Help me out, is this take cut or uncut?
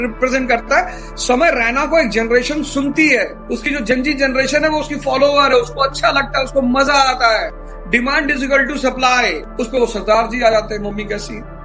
uncut